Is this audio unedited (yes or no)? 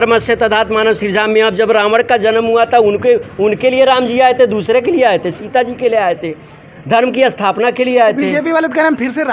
yes